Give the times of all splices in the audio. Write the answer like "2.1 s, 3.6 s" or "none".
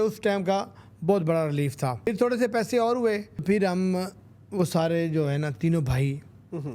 2.1 s, 3.4 s